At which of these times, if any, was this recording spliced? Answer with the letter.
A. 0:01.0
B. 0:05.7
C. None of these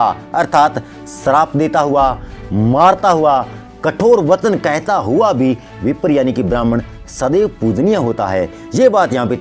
C